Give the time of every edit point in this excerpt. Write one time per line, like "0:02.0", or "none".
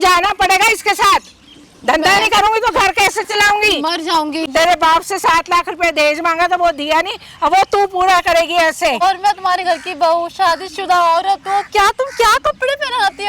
0:04.5
0:09.0